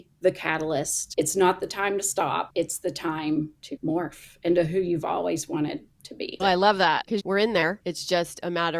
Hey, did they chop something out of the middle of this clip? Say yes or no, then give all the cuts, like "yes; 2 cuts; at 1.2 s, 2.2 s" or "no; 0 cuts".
yes; 6 cuts; at 1.0 s, 2.5 s, 3.6 s, 6.4 s, 7.1 s, 7.8 s